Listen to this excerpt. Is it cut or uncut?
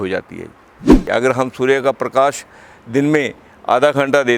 cut